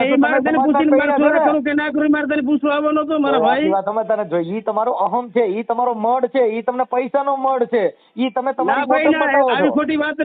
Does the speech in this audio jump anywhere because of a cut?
no; 0 cuts

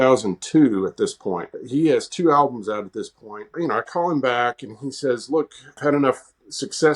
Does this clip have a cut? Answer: yes; 3 cuts; at 1.6 s, 3.5 s, 5.8 s

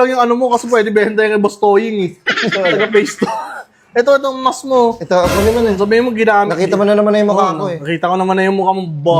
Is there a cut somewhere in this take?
no; 0 cuts

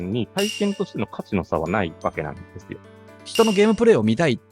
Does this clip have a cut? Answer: yes; 1 cut; at 3.1 s

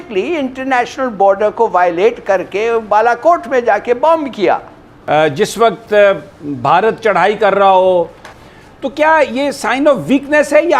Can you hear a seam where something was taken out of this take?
yes; 2 cuts; at 4.7 s, 8.2 s

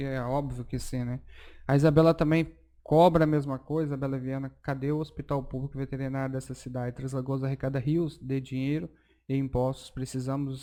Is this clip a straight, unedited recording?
yes; 0 cuts

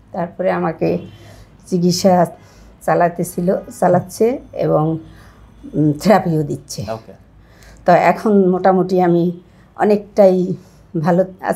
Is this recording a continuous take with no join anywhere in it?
yes; 0 cuts

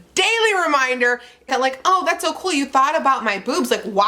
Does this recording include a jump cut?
yes; 1 cut; at 1.5 s

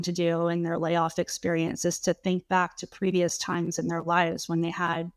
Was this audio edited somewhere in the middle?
no; 0 cuts

